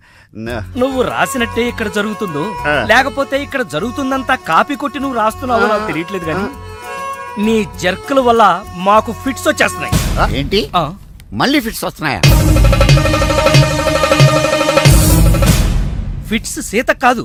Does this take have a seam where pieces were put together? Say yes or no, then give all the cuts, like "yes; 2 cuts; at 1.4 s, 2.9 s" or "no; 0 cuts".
no; 0 cuts